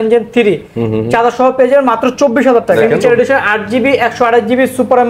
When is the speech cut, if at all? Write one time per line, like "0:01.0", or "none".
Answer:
0:02.8